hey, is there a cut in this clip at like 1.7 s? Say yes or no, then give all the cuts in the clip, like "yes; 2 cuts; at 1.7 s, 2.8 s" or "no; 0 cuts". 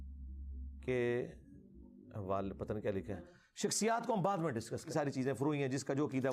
no; 2 cuts; at 3.4 s, 4.9 s